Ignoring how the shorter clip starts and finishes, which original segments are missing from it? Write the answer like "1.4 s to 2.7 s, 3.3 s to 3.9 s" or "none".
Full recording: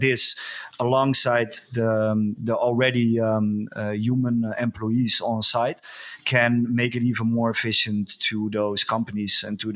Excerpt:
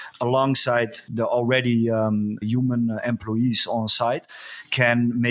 1.7 s to 2.4 s, 3.7 s to 4.0 s